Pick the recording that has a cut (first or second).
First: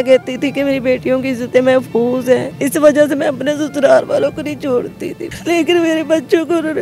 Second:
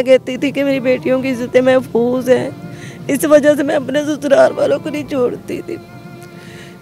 first